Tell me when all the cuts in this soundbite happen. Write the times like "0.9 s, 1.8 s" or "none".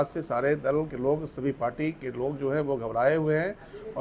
none